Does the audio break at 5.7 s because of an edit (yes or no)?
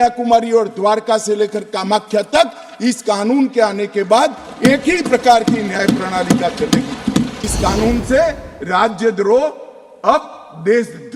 no